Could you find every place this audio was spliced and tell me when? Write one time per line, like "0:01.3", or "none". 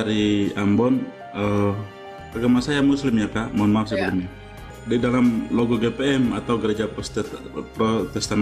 0:02.2
0:04.7